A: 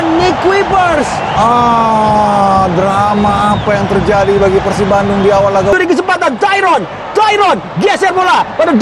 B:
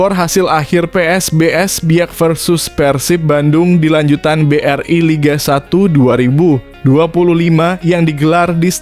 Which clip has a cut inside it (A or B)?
A